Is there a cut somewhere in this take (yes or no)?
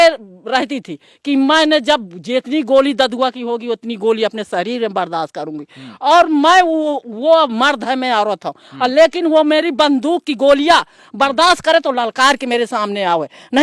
no